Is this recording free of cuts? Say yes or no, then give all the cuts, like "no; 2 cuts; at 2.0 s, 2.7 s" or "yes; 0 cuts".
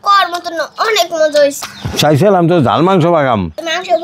no; 1 cut; at 1.6 s